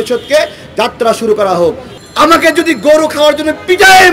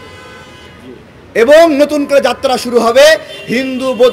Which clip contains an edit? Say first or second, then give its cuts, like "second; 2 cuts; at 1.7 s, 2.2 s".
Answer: first; 1 cut; at 1.9 s